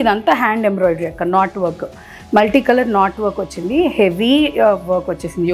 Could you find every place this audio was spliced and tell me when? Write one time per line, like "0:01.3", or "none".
none